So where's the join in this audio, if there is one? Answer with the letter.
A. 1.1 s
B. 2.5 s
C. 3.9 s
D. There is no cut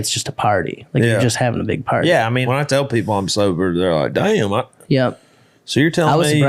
B